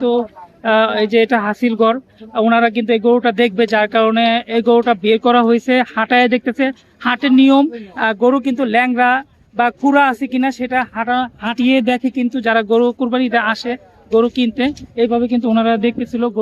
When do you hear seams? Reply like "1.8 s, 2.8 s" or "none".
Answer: none

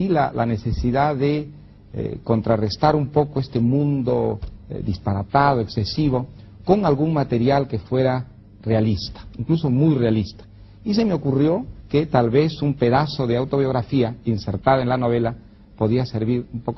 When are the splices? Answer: 6.1 s

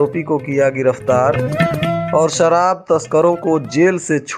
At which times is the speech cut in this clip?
none

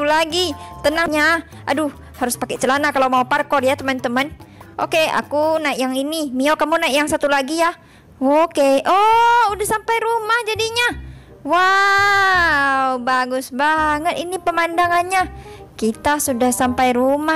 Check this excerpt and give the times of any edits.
1.1 s

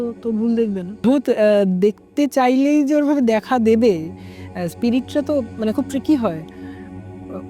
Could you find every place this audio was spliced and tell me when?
1.0 s

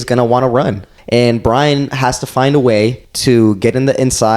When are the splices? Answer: 0.9 s, 3.1 s

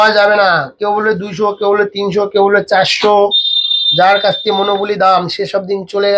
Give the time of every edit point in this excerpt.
none

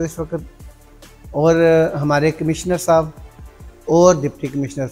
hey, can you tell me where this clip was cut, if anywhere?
none

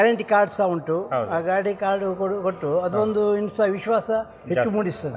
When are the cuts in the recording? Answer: none

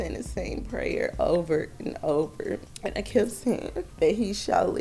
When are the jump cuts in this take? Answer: 2.7 s, 3.8 s

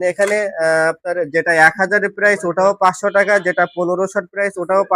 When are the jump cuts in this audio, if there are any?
none

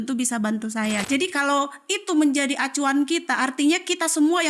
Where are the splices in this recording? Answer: 1.0 s

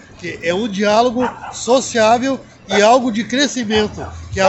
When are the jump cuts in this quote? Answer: none

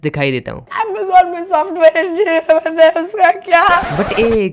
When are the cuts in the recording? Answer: none

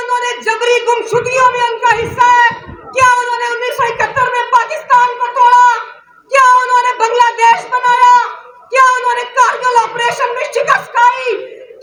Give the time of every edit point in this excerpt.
none

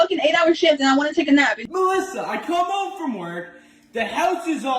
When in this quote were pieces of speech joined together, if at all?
1.6 s

